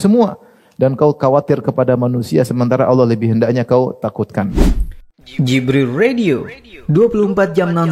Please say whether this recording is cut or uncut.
cut